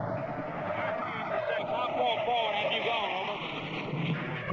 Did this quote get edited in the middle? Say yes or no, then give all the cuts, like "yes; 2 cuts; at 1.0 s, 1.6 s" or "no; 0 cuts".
no; 0 cuts